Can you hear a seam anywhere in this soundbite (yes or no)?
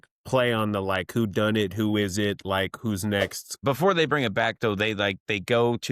yes